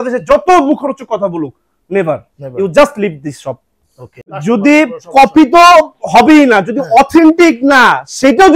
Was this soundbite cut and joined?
yes; 1 cut; at 4.2 s

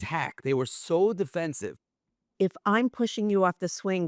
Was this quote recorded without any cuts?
no; 1 cut; at 2.3 s

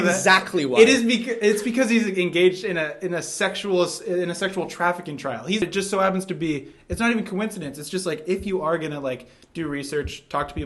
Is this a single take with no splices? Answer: no; 1 cut; at 5.6 s

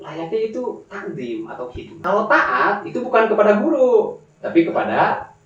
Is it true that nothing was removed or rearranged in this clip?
no; 1 cut; at 1.9 s

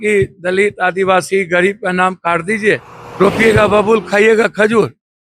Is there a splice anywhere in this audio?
yes; 1 cut; at 3.0 s

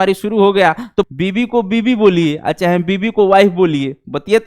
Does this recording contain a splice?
yes; 1 cut; at 1.1 s

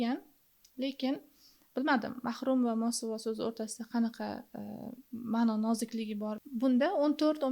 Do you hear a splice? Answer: yes; 1 cut; at 6.3 s

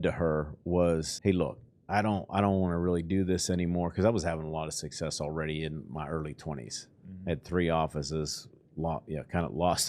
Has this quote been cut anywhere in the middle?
yes; 1 cut; at 1.1 s

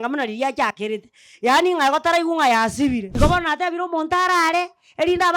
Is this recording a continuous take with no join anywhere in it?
no; 1 cut; at 3.1 s

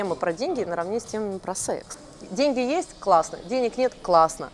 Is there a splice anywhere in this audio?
yes; 1 cut; at 1.9 s

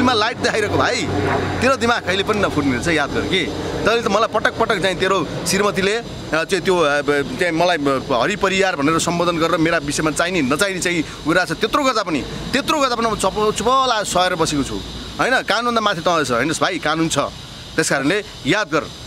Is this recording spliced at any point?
no; 0 cuts

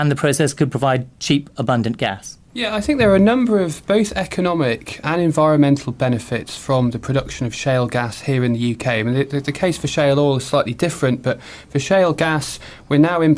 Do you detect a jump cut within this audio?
yes; 1 cut; at 5.6 s

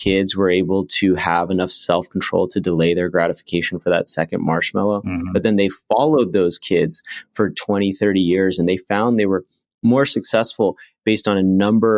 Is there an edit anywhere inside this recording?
no; 0 cuts

